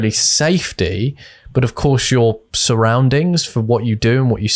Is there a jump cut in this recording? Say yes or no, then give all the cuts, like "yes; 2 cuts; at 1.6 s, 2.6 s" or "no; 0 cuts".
no; 0 cuts